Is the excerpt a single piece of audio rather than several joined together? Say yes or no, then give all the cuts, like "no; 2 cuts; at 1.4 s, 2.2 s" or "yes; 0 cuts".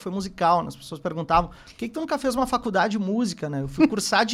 yes; 0 cuts